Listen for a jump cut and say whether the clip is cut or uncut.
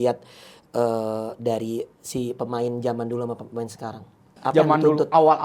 cut